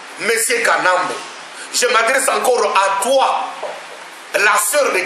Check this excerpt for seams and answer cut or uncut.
uncut